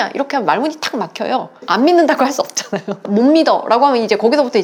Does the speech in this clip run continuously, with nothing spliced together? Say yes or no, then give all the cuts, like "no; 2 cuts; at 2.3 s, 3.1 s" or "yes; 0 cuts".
yes; 0 cuts